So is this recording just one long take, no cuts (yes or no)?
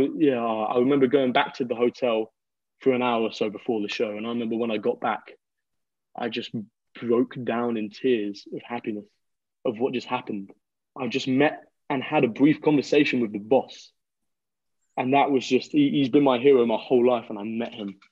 yes